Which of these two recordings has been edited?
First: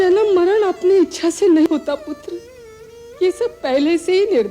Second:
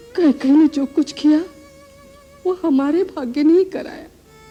first; 1 cut; at 1.7 s

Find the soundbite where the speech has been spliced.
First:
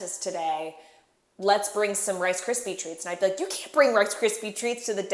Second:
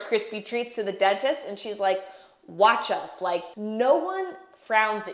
second; 1 cut; at 3.5 s

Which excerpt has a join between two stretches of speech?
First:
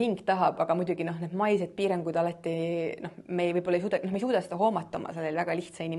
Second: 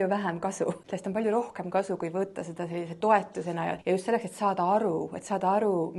second; 2 cuts; at 0.9 s, 3.8 s

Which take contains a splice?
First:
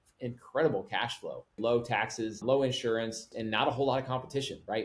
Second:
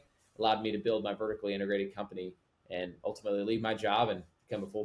first; 3 cuts; at 1.6 s, 2.4 s, 3.3 s

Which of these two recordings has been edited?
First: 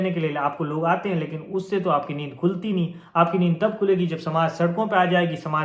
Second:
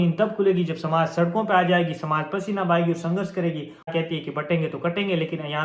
second; 1 cut; at 3.9 s

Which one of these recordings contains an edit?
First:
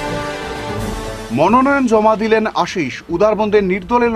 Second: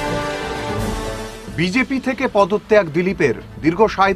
first; 1 cut; at 1.2 s

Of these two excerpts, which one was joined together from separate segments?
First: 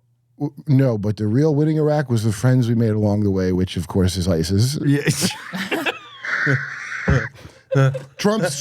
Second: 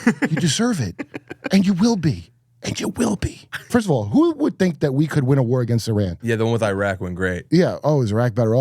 second; 3 cuts; at 3.6 s, 6.2 s, 7.4 s

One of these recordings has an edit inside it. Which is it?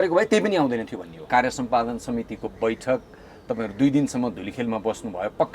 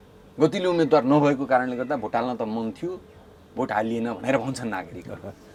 first; 1 cut; at 1.3 s

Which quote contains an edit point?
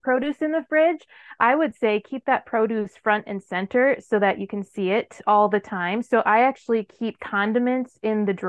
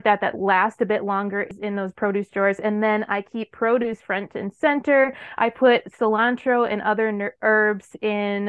second; 1 cut; at 1.5 s

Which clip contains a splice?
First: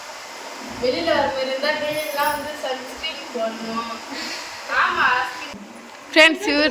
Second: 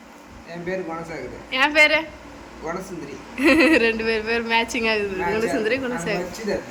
first; 1 cut; at 5.5 s

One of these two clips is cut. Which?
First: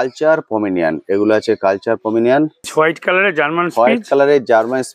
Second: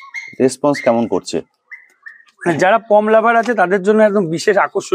first; 1 cut; at 2.6 s

